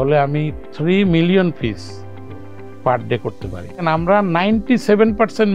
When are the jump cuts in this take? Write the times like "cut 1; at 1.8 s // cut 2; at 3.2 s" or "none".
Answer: cut 1; at 3.8 s